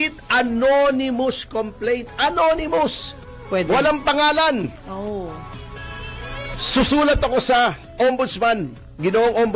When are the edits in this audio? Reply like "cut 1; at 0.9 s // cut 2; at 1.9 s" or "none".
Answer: none